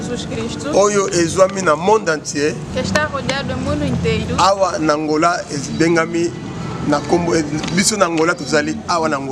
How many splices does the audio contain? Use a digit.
0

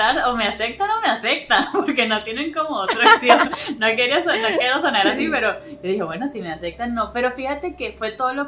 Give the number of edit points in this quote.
0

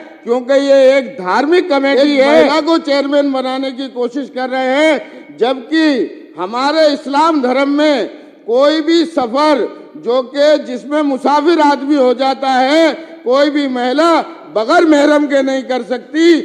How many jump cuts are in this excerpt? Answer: 1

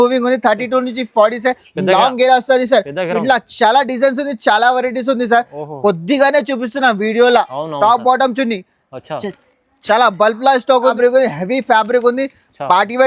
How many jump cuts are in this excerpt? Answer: 1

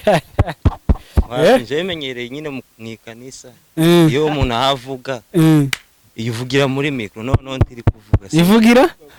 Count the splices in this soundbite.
0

